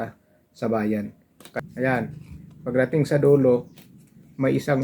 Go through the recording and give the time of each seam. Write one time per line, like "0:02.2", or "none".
0:01.6